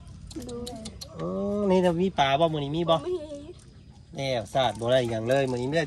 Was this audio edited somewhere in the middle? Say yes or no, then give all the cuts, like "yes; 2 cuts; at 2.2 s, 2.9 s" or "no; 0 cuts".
no; 0 cuts